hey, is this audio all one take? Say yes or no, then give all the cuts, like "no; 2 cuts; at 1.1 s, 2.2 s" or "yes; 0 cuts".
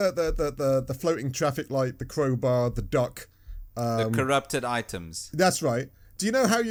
yes; 0 cuts